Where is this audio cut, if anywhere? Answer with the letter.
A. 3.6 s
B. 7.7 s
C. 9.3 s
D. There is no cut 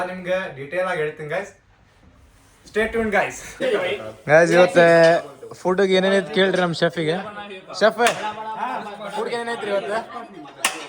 A